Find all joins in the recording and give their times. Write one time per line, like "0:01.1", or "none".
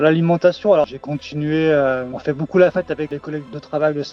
0:00.9
0:03.2